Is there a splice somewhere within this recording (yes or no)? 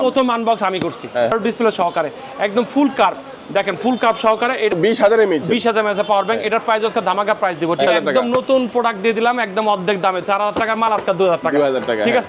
yes